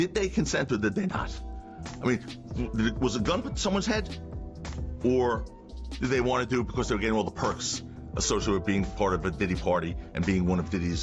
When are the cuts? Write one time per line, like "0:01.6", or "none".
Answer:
none